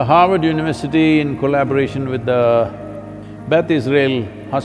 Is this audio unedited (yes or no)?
yes